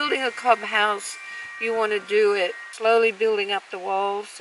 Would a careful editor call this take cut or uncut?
cut